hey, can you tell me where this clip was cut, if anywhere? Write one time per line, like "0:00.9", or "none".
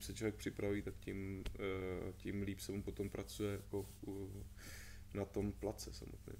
none